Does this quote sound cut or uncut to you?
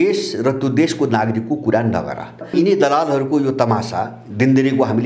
cut